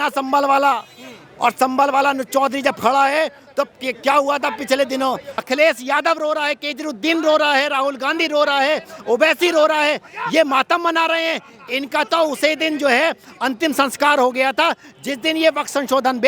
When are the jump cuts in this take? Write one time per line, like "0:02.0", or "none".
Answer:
0:05.3